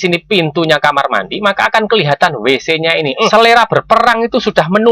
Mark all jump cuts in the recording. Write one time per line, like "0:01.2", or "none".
0:03.3

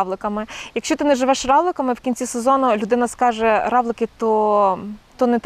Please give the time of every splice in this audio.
none

